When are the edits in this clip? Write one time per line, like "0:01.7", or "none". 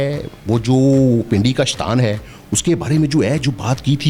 none